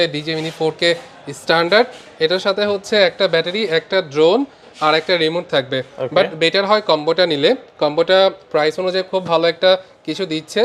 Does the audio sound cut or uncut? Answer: uncut